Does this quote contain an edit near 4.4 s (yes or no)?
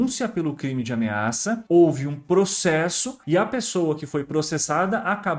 no